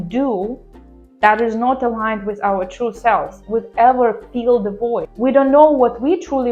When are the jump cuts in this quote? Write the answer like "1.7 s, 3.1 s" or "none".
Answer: 5.1 s